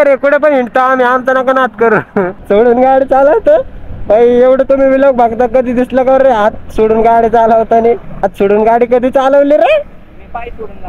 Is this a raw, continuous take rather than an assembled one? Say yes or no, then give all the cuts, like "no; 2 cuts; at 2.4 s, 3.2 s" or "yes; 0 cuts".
no; 2 cuts; at 2.4 s, 8.2 s